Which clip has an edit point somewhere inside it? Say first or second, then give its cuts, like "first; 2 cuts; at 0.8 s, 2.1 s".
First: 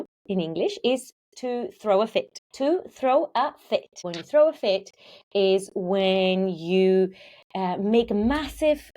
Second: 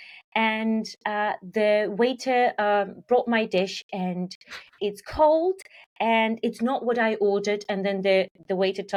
first; 2 cuts; at 2.4 s, 4.2 s